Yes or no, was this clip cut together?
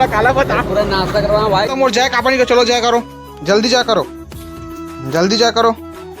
yes